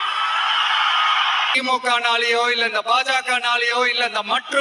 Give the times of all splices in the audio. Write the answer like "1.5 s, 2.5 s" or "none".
1.5 s

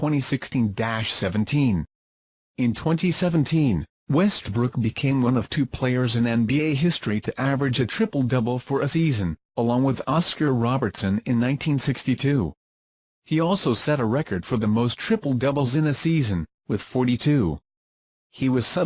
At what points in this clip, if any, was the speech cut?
5.7 s

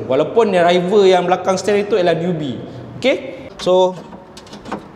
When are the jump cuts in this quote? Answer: 3.4 s

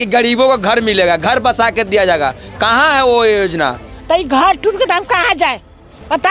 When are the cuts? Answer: 3.9 s

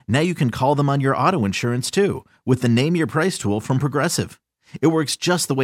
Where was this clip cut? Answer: none

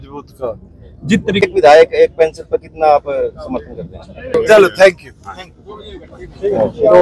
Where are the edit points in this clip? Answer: 1.4 s, 4.3 s

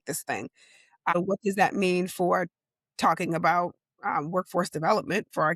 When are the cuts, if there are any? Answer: 1.1 s

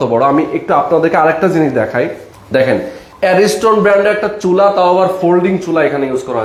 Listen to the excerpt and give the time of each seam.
none

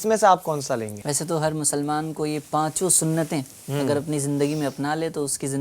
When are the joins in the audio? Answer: 1.0 s

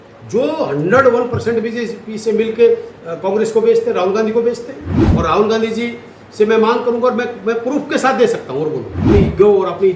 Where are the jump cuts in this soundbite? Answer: 5.0 s, 9.1 s

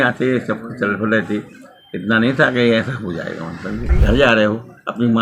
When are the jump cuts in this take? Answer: 3.9 s

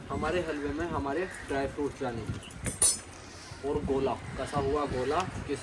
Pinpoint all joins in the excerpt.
none

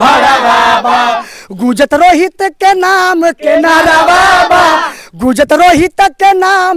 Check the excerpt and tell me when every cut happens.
none

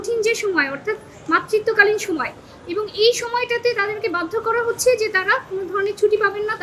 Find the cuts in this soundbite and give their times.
none

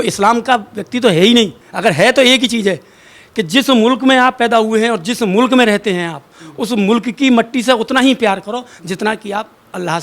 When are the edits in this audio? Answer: 1.6 s

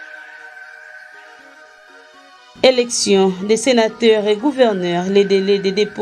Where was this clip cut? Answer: 1.7 s

